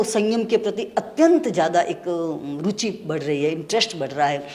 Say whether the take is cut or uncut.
uncut